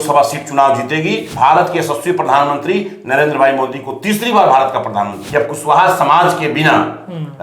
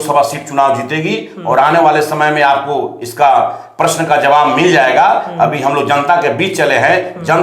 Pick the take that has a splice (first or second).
first